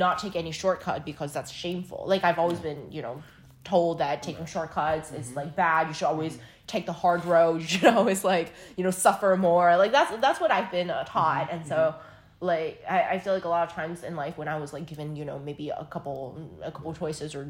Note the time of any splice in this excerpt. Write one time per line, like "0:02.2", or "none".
none